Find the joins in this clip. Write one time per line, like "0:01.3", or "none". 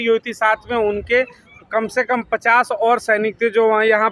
none